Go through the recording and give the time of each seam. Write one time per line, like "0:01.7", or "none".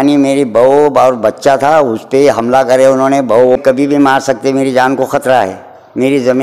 0:03.6